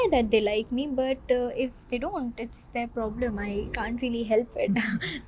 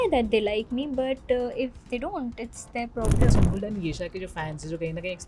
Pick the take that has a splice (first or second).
second